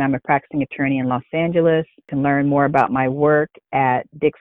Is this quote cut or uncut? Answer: uncut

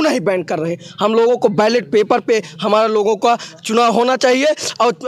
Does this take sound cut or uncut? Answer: uncut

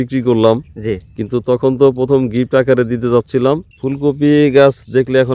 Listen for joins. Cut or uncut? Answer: cut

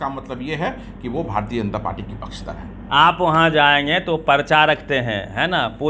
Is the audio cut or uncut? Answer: cut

